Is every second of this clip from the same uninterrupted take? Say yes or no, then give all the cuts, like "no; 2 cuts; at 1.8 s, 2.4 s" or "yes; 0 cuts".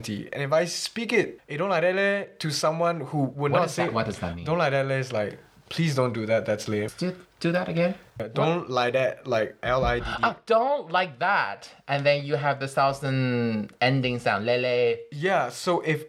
no; 1 cut; at 8.1 s